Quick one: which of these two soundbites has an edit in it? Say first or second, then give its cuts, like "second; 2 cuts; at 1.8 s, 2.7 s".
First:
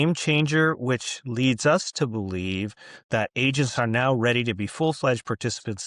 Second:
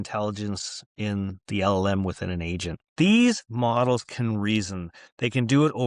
second; 1 cut; at 2.8 s